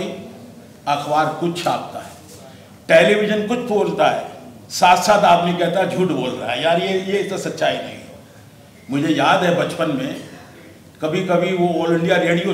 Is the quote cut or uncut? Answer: uncut